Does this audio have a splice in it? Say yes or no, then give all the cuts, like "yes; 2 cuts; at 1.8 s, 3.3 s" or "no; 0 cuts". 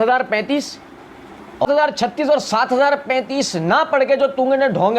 yes; 1 cut; at 1.7 s